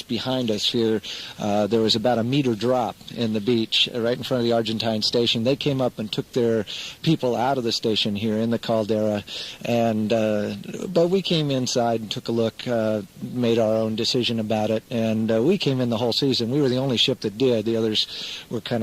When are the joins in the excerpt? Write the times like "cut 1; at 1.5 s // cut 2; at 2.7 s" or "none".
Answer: cut 1; at 3.0 s